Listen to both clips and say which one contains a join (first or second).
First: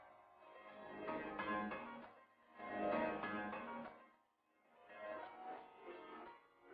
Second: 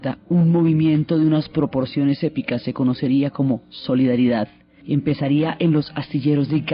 second